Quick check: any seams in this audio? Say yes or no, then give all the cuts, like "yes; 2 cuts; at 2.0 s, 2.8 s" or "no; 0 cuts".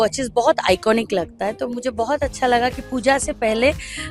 no; 0 cuts